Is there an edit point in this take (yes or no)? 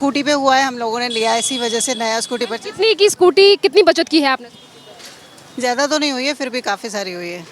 no